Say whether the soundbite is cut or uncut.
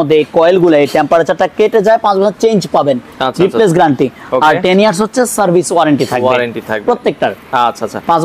uncut